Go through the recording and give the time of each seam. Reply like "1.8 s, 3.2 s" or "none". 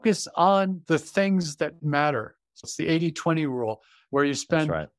0.8 s, 2.1 s